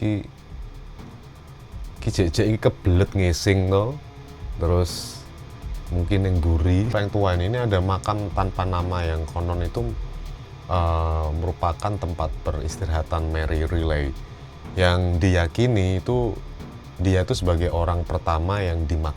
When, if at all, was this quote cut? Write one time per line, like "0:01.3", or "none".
0:06.9